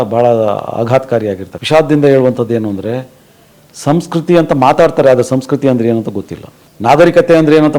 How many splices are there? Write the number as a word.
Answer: one